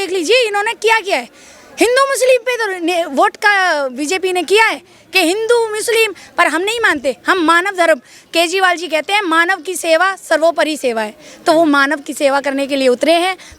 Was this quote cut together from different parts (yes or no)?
no